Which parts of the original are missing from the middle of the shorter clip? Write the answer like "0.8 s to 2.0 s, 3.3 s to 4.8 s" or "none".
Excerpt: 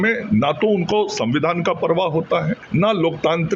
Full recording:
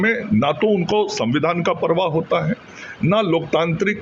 2.6 s to 2.9 s